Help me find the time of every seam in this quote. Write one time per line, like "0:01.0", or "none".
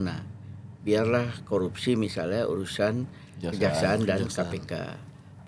none